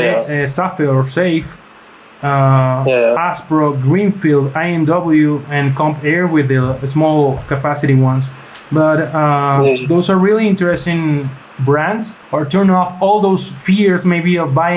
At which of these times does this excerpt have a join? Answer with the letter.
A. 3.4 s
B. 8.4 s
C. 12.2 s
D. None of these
C